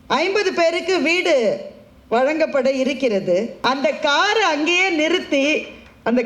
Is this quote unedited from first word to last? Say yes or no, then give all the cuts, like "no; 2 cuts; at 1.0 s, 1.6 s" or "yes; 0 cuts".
no; 1 cut; at 3.5 s